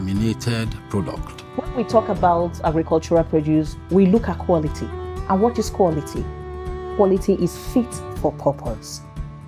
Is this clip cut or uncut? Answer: cut